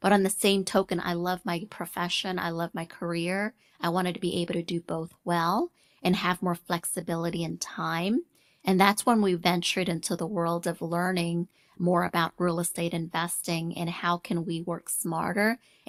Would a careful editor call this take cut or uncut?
uncut